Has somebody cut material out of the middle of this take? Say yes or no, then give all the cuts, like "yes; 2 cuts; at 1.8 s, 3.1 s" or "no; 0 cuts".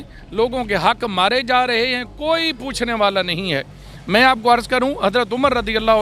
no; 0 cuts